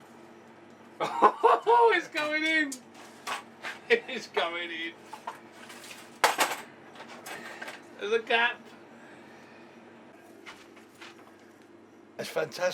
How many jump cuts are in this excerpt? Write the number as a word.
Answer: one